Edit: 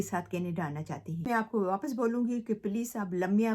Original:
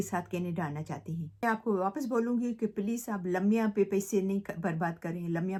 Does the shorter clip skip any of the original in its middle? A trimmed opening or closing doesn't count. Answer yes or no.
yes